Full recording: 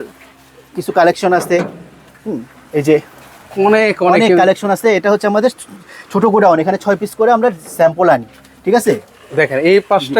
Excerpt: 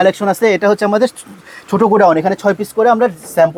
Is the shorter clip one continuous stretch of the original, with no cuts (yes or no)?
yes